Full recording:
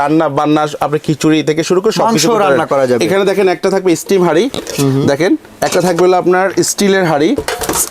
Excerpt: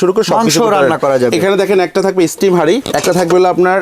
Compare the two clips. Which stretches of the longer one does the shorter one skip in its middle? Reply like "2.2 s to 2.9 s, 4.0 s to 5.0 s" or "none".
4.6 s to 5.6 s